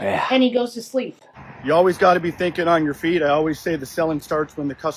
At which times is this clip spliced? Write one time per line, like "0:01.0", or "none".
0:01.3